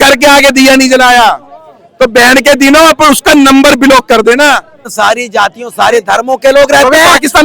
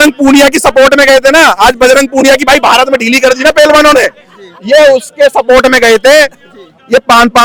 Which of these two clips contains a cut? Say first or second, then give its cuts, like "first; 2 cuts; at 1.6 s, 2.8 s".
first; 1 cut; at 4.9 s